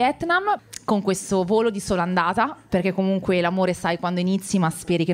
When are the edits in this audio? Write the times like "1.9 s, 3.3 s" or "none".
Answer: none